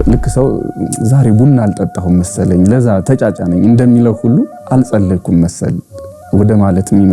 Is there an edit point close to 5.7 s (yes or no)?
no